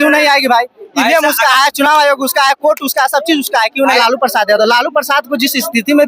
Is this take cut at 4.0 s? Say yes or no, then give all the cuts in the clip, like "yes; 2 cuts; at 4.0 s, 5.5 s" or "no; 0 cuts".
yes; 1 cut; at 4.0 s